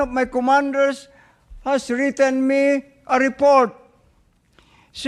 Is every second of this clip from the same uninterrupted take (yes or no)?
yes